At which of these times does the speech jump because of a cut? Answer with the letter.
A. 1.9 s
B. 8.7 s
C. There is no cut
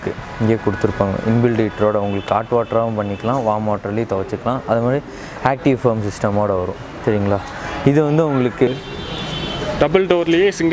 B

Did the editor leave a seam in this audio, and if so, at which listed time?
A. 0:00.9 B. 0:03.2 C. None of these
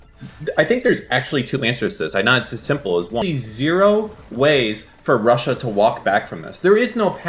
B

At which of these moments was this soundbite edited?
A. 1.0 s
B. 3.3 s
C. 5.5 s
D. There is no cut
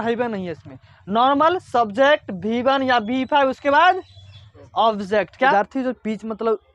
C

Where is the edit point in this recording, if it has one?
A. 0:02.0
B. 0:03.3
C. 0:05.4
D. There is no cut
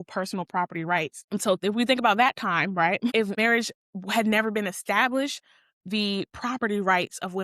B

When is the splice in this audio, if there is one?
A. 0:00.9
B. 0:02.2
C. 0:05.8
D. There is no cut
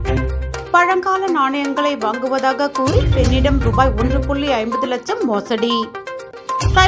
D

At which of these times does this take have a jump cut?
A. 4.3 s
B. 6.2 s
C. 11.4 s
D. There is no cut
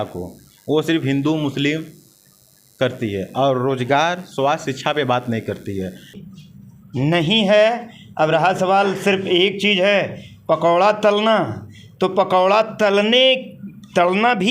B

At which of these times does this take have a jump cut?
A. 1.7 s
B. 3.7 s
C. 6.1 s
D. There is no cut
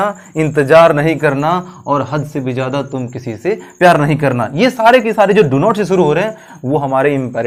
D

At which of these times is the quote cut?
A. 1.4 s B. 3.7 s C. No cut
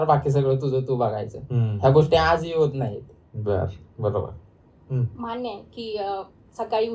C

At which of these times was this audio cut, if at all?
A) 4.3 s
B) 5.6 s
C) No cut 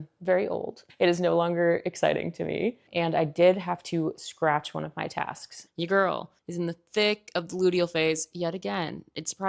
B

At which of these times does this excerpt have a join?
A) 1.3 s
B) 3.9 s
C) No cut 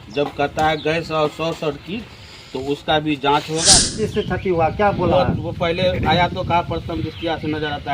B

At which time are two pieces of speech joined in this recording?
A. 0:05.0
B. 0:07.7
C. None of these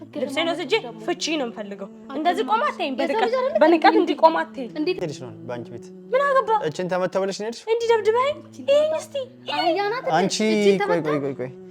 A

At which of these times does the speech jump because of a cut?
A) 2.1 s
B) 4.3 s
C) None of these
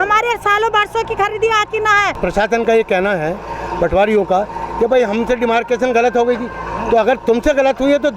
A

